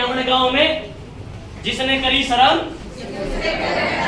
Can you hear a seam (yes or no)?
no